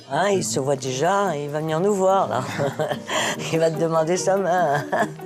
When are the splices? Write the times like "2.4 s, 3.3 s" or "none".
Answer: none